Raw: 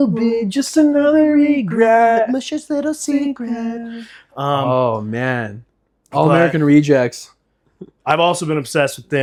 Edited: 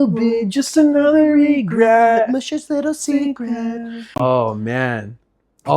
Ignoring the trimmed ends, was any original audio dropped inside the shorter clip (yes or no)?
yes